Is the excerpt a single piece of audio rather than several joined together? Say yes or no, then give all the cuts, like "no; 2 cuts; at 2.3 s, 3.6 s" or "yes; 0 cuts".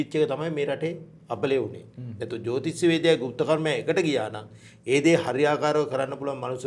yes; 0 cuts